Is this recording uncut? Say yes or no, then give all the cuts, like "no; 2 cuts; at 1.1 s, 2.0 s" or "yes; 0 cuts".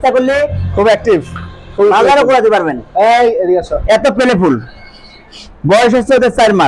yes; 0 cuts